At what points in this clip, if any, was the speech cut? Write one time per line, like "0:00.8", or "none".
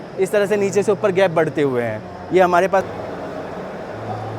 0:02.9